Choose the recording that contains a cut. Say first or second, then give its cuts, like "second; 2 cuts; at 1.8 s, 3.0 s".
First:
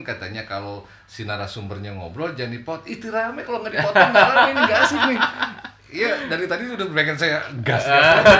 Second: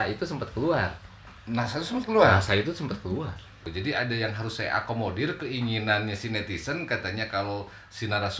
second; 1 cut; at 3.7 s